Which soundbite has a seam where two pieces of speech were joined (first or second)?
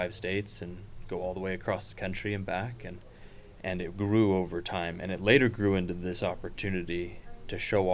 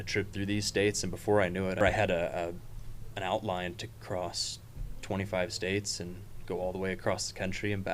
second